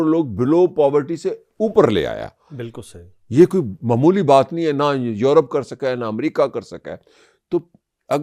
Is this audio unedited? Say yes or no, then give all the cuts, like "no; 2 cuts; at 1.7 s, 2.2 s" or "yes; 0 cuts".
yes; 0 cuts